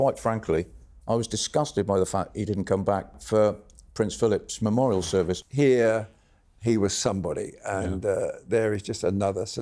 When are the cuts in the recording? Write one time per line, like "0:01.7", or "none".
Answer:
0:03.1
0:05.4